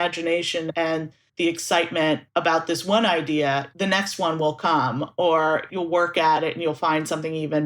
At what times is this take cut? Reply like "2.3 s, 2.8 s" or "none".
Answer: 0.9 s, 2.2 s, 3.7 s, 5.7 s, 6.4 s